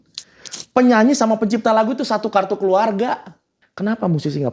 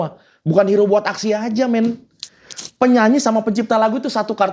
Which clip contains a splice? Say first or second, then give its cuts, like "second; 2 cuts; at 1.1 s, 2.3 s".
first; 1 cut; at 3.6 s